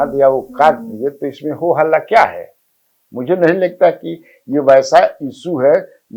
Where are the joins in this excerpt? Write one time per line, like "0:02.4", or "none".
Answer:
none